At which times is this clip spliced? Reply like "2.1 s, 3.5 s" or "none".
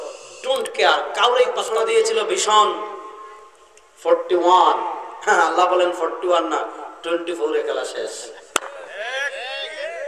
1.6 s